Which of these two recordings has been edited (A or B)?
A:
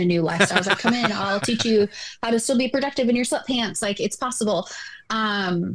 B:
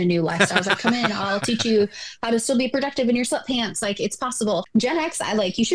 B